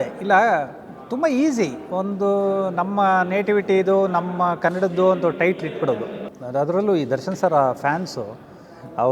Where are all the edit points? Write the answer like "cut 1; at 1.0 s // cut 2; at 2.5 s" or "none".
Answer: cut 1; at 6.3 s